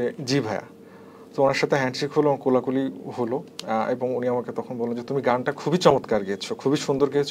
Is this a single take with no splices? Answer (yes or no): yes